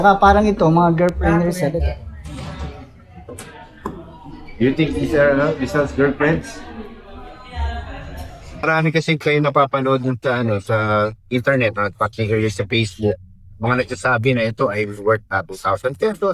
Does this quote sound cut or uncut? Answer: cut